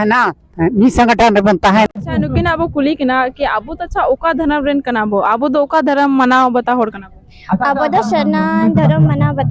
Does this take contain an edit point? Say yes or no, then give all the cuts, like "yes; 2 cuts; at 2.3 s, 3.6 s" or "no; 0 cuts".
yes; 1 cut; at 1.9 s